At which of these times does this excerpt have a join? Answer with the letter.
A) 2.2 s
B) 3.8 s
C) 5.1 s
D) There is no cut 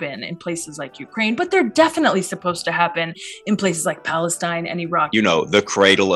C